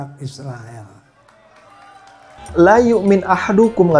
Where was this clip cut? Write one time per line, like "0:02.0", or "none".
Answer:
0:02.5